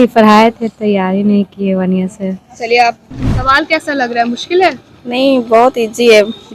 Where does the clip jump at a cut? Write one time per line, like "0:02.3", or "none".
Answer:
0:03.1